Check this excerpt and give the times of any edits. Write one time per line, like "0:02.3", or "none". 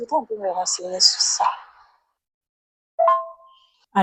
none